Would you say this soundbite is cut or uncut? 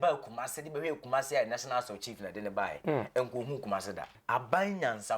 cut